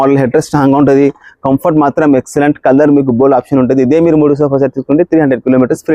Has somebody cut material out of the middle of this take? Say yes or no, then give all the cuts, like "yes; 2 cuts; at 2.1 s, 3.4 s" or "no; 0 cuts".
no; 0 cuts